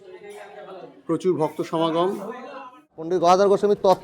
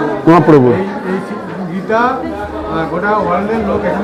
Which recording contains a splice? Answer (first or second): first